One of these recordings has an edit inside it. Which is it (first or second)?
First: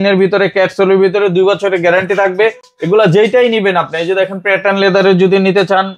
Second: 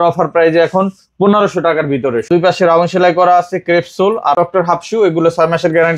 second